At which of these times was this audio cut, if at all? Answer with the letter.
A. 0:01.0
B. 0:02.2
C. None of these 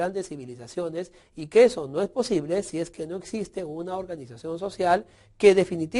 A